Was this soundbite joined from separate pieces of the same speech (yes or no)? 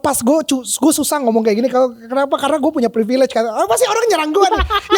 no